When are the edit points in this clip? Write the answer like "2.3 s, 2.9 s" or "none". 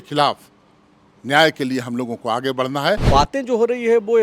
3.0 s

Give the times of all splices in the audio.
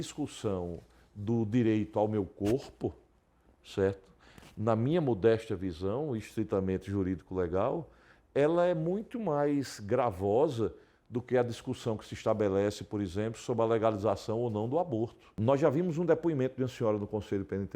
15.2 s

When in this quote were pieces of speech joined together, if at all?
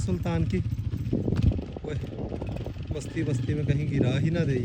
none

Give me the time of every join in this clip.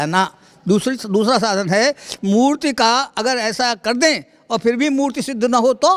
none

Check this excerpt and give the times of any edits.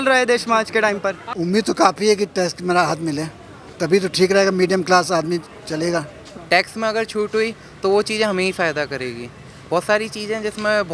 1.3 s, 6.3 s

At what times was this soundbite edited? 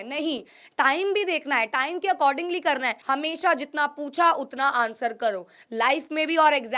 3.0 s

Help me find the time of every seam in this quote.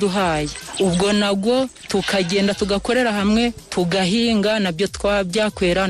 none

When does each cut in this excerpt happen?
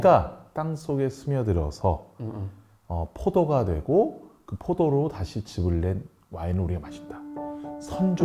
none

